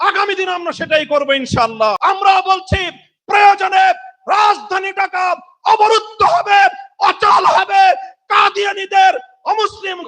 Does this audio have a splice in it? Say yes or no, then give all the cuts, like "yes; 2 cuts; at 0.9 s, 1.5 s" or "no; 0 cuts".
yes; 1 cut; at 2.0 s